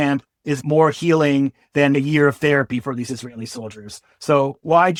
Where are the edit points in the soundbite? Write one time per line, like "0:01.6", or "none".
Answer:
none